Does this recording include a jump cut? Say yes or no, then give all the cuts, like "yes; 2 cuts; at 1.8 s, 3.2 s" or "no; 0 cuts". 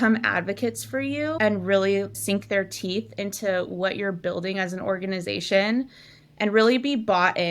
yes; 1 cut; at 1.3 s